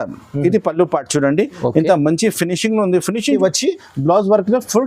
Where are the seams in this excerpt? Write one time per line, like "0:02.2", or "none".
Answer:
0:03.4